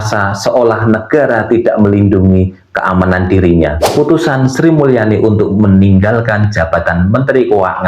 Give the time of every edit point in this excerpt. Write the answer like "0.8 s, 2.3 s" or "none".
3.9 s